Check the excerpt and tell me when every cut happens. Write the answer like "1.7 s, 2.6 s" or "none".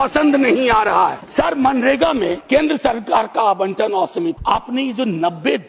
1.2 s, 2.4 s, 4.4 s

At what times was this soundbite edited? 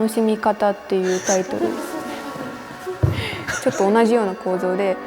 3.5 s

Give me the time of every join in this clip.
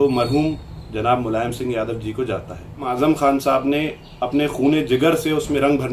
2.9 s

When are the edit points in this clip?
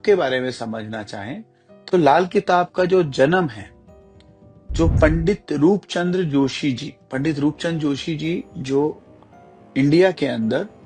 none

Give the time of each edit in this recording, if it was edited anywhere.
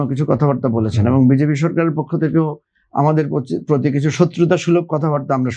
none

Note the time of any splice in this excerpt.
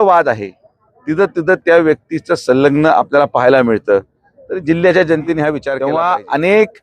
5.7 s

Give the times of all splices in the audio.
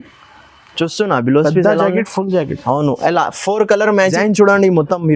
4.1 s

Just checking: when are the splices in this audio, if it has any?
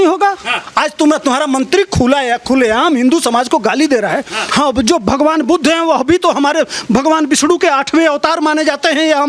4.4 s

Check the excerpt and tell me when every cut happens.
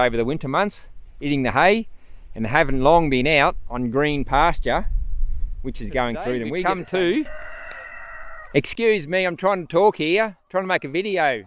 6.6 s

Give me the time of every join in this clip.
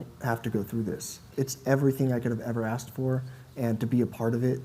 1.2 s

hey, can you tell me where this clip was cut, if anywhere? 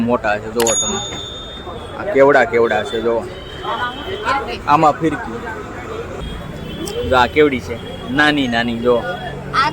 6.1 s

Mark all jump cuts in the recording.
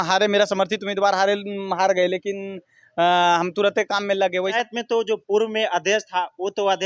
4.5 s

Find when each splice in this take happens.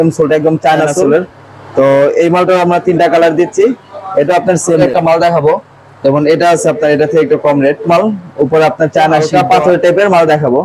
1.1 s, 4.8 s, 7.9 s, 9.2 s

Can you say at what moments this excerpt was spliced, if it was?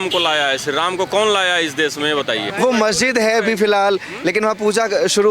2.5 s

